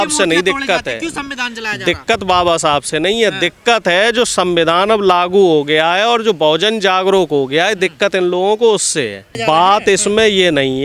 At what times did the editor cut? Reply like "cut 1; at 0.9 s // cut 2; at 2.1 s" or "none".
cut 1; at 9.3 s